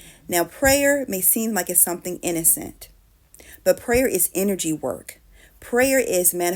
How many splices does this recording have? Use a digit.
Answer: 0